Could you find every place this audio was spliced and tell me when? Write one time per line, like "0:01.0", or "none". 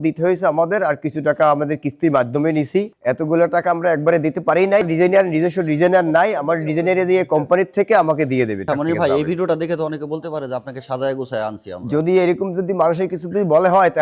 0:02.9
0:04.8
0:08.7